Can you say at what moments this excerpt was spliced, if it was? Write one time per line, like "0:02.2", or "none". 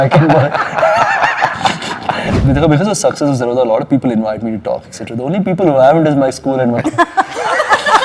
0:02.3